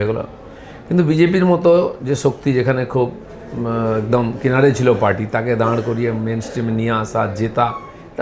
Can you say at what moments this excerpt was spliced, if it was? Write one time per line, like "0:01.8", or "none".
none